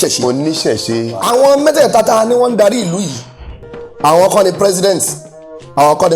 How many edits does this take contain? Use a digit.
1